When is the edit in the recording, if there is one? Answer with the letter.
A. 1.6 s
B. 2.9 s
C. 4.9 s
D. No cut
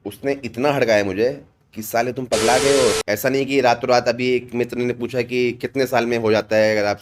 B